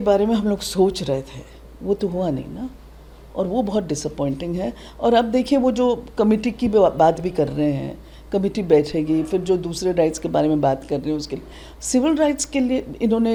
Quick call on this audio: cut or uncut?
uncut